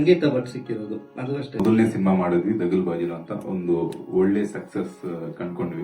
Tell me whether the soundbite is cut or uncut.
cut